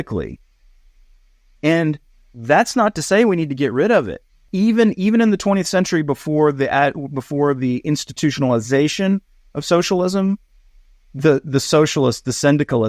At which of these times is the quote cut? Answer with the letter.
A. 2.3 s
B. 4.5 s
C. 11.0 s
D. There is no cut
B